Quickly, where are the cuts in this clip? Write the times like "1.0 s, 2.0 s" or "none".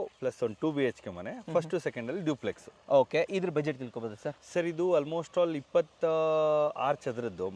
none